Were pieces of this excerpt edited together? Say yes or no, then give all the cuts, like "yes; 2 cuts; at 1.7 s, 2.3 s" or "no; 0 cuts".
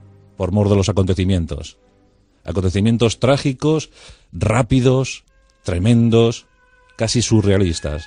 no; 0 cuts